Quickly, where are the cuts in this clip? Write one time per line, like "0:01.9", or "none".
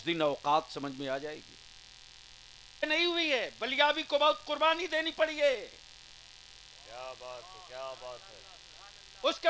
0:02.8